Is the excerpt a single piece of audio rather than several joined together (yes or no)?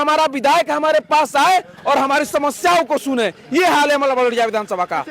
yes